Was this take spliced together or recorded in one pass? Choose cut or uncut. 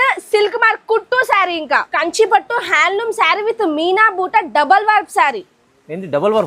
cut